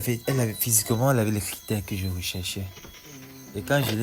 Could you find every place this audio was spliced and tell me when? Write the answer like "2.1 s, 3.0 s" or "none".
none